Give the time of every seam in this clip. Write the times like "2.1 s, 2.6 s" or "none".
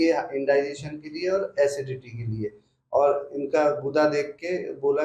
none